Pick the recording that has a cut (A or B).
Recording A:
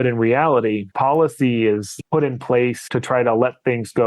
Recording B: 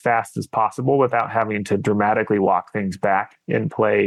A